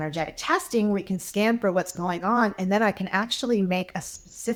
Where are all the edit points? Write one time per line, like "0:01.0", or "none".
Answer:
none